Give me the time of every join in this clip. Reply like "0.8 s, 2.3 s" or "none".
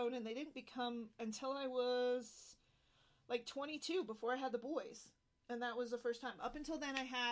1.2 s